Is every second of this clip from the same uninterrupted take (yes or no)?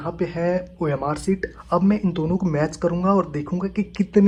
yes